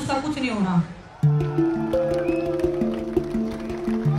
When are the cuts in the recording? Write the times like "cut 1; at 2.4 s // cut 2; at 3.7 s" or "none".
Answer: cut 1; at 1.4 s

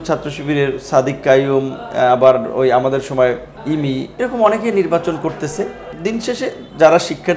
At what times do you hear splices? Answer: cut 1; at 3.5 s // cut 2; at 5.9 s

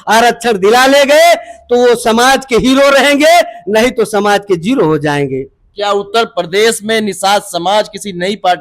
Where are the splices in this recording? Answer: none

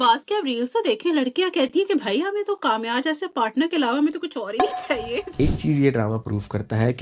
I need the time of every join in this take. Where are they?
cut 1; at 5.4 s

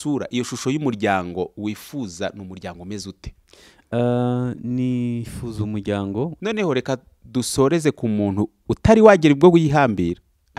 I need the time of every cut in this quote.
cut 1; at 6.4 s

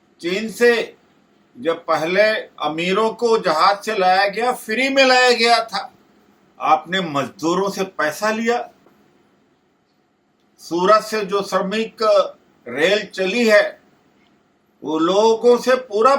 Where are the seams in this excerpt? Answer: none

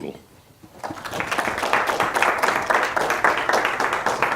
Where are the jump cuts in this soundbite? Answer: cut 1; at 3.2 s

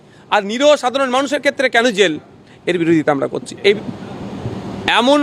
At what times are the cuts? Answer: cut 1; at 3.8 s

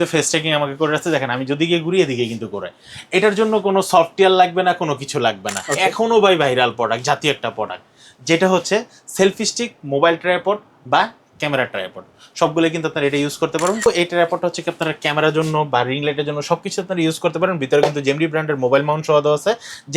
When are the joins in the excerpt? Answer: cut 1; at 5.5 s // cut 2; at 13.9 s

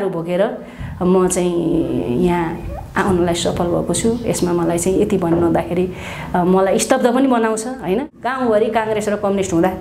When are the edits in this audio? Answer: cut 1; at 8.1 s

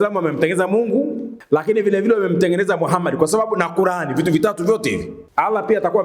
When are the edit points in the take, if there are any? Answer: cut 1; at 1.3 s // cut 2; at 5.2 s

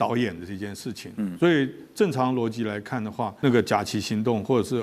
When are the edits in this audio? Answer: cut 1; at 3.3 s

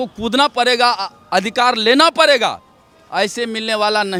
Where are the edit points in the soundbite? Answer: none

